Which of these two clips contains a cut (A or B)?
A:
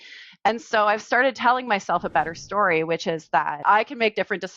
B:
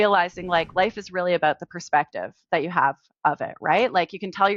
A